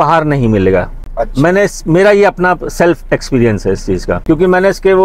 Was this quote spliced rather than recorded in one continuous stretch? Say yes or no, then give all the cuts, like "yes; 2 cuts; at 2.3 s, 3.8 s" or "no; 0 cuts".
no; 0 cuts